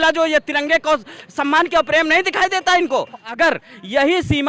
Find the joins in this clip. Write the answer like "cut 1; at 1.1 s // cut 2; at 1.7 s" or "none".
cut 1; at 3.3 s